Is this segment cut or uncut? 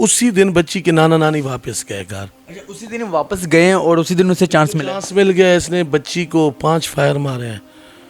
uncut